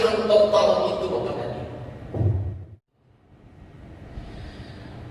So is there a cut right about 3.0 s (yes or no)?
yes